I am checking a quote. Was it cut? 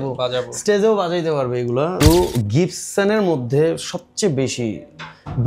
yes; 1 cut; at 1.9 s

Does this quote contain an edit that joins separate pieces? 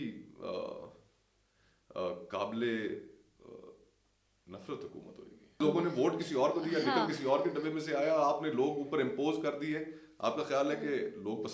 no; 0 cuts

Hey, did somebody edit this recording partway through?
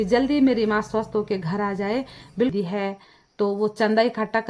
yes; 1 cut; at 2.5 s

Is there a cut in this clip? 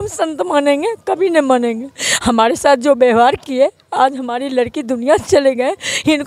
no; 0 cuts

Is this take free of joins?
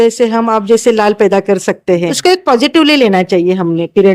no; 1 cut; at 2.1 s

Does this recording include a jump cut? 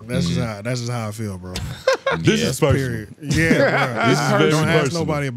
no; 0 cuts

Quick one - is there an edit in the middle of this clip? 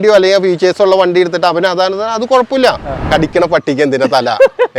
yes; 1 cut; at 3.1 s

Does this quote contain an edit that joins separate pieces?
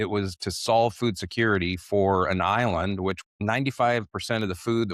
yes; 1 cut; at 3.2 s

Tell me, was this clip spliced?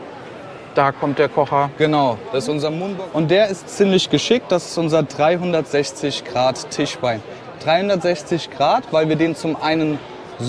yes; 1 cut; at 2.8 s

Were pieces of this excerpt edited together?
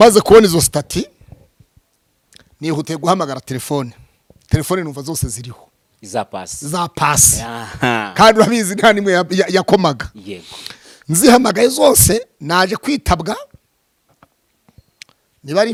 no; 0 cuts

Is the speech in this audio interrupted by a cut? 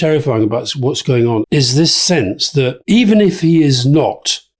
yes; 2 cuts; at 1.4 s, 2.8 s

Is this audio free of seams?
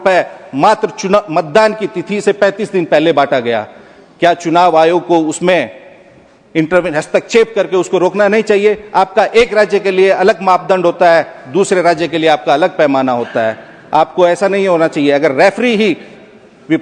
yes; 0 cuts

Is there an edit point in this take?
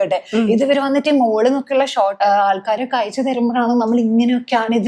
yes; 1 cut; at 2.1 s

